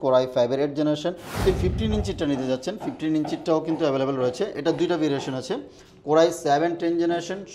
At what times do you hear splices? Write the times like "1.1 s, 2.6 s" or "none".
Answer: 1.4 s